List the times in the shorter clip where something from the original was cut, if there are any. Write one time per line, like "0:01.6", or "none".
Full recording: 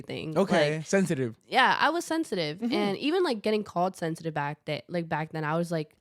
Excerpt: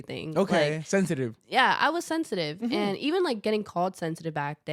none